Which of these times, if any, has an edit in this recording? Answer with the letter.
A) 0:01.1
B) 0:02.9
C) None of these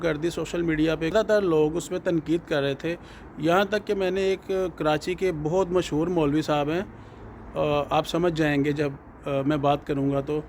A